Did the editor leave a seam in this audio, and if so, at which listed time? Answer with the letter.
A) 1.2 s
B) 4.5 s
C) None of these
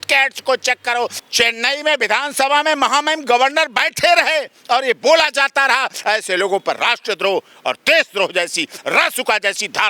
A